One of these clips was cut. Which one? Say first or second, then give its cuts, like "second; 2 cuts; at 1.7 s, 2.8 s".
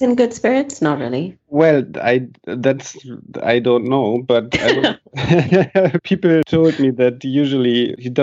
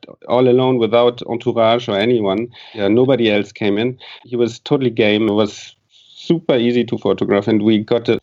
first; 1 cut; at 6.2 s